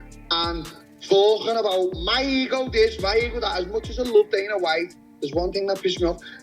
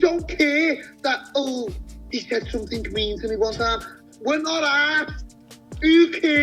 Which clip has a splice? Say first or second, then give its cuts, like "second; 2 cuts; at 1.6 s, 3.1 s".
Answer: first; 1 cut; at 3.7 s